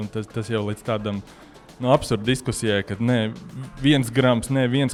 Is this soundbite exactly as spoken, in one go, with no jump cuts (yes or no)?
yes